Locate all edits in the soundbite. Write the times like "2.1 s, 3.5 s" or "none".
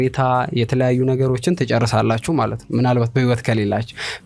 none